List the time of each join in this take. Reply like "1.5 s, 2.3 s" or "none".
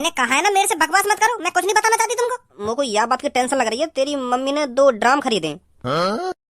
2.6 s